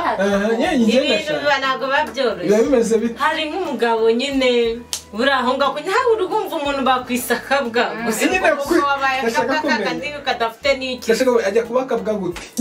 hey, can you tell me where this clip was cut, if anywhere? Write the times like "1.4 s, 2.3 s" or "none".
none